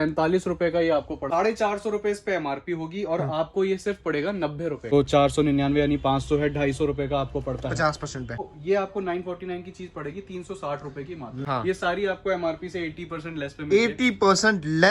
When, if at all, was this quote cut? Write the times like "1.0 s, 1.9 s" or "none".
1.2 s, 4.9 s, 8.5 s, 11.4 s